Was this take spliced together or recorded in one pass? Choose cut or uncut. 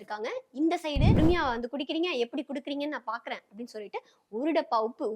cut